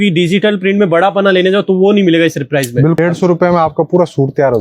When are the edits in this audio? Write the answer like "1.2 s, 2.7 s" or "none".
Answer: 3.0 s